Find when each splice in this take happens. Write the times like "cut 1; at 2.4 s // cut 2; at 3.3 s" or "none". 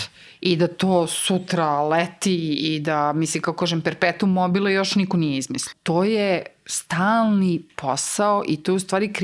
cut 1; at 5.7 s

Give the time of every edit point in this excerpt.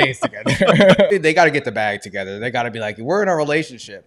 cut 1; at 1.1 s

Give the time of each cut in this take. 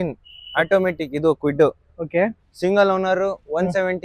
cut 1; at 2.4 s

